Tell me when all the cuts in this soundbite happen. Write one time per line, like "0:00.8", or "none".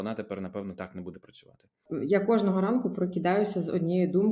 0:01.8